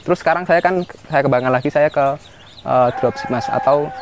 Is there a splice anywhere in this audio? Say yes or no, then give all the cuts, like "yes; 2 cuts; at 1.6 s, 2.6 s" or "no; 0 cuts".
no; 0 cuts